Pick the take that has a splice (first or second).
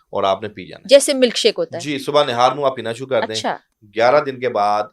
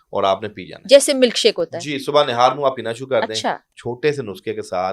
second